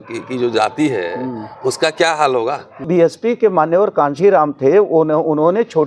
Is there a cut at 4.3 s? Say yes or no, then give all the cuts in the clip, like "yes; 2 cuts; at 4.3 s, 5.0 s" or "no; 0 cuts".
no; 1 cut; at 2.9 s